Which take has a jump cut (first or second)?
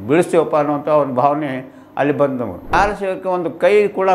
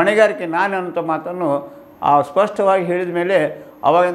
first